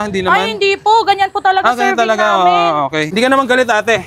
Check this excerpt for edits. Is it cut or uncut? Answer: uncut